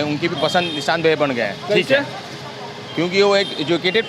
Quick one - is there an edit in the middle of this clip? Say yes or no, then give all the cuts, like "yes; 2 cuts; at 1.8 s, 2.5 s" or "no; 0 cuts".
no; 0 cuts